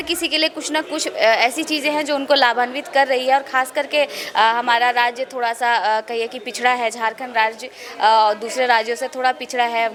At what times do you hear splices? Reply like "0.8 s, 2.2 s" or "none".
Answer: none